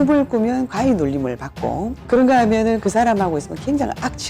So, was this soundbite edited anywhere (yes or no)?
yes